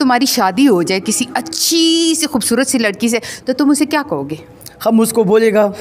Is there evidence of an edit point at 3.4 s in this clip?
no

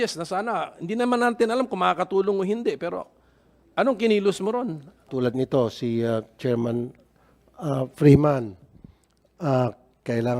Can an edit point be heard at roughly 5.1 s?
yes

